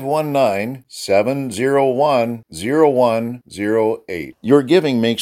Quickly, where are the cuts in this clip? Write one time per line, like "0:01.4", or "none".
none